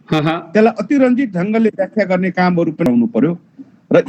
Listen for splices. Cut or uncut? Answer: cut